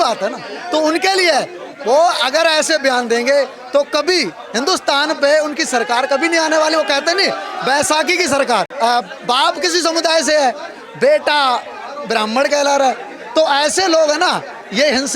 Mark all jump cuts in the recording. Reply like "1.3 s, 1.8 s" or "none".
8.7 s